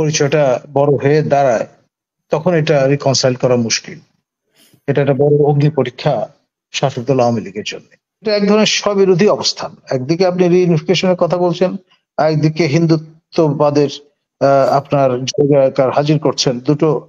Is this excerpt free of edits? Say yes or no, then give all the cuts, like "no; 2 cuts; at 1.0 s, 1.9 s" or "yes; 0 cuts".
no; 1 cut; at 8.3 s